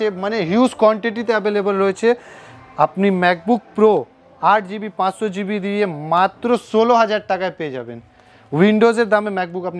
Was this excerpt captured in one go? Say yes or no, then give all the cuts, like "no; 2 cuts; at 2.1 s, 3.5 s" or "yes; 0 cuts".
yes; 0 cuts